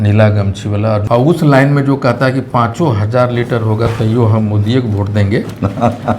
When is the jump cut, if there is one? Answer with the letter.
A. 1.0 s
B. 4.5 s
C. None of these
A